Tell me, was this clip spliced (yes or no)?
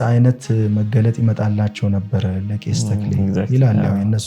no